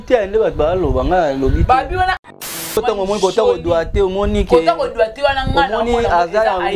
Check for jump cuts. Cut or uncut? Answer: cut